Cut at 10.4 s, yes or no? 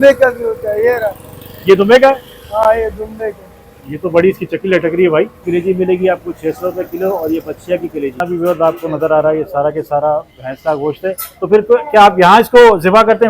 no